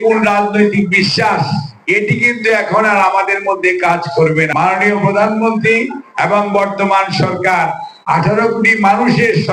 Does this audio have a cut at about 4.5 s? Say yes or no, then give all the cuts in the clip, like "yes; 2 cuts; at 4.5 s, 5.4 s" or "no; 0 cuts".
yes; 1 cut; at 4.5 s